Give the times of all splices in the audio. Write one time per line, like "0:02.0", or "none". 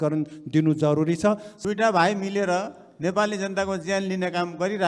0:01.5